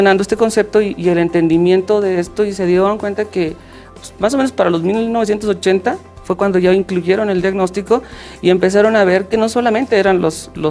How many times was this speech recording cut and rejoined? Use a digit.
1